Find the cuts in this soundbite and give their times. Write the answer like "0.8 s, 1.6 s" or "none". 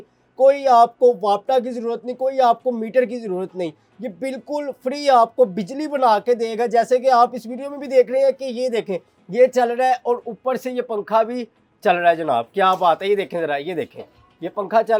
none